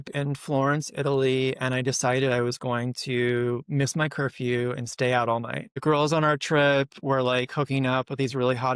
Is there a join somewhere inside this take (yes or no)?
yes